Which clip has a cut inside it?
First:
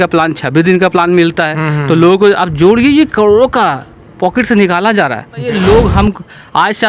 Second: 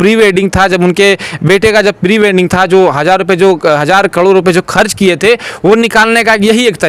first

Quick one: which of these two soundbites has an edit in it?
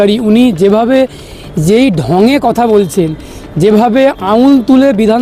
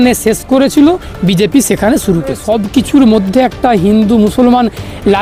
second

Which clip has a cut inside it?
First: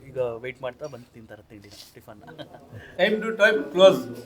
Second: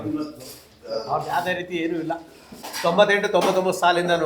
first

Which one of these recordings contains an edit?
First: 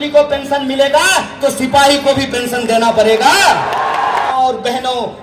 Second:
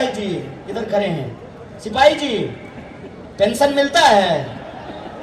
first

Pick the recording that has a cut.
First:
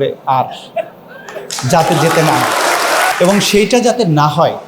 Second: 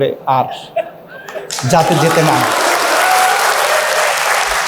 first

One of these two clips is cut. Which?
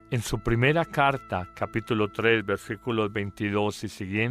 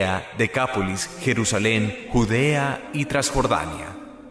second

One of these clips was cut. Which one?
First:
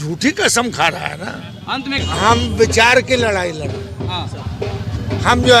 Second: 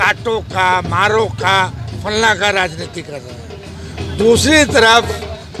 first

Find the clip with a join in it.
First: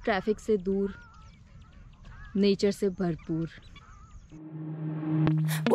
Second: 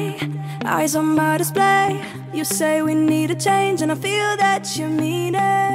first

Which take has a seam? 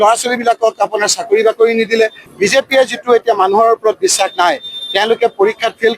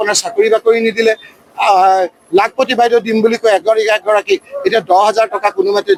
first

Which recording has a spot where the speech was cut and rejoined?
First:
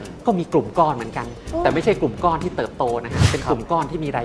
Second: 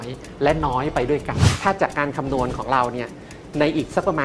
second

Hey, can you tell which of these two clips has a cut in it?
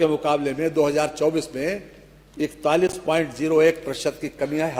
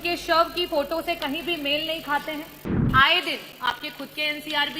second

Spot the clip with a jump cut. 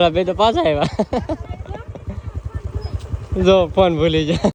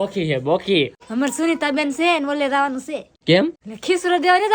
second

